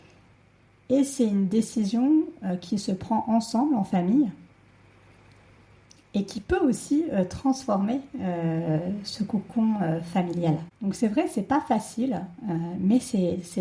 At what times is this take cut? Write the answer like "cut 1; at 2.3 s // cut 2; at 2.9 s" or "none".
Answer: cut 1; at 10.7 s

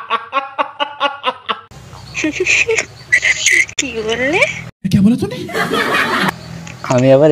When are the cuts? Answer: none

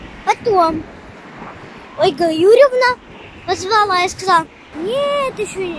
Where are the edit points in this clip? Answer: none

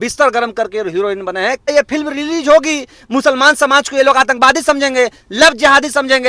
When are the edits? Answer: cut 1; at 1.7 s

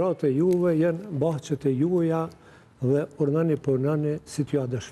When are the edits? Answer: none

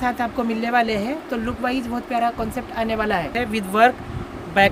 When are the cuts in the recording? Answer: cut 1; at 3.3 s

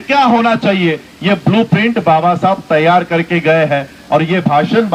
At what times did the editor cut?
none

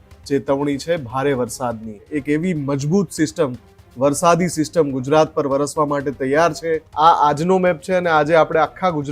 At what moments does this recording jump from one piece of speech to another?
cut 1; at 2.1 s // cut 2; at 6.9 s

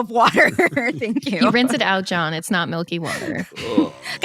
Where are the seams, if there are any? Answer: cut 1; at 1.4 s

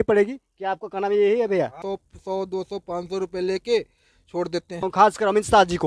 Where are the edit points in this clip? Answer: cut 1; at 1.8 s // cut 2; at 4.9 s

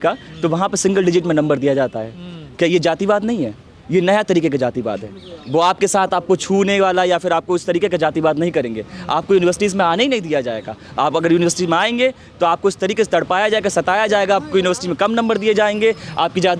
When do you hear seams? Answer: none

